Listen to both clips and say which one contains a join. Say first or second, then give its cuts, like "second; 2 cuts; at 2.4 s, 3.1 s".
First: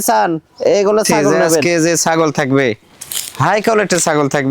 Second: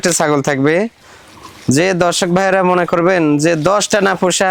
first; 1 cut; at 1.6 s